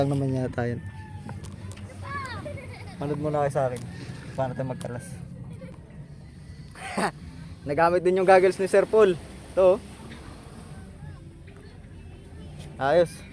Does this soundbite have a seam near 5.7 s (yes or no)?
yes